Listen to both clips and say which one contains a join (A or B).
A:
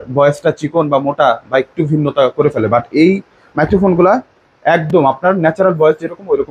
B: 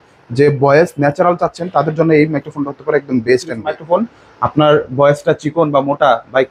B